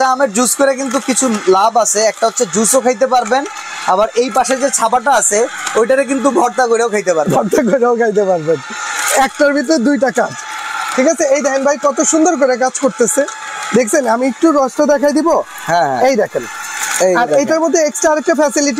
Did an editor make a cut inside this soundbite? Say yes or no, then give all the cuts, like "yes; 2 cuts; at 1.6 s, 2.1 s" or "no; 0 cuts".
no; 0 cuts